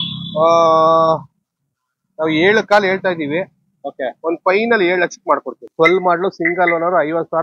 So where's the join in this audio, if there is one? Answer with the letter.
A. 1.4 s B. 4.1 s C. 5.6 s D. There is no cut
C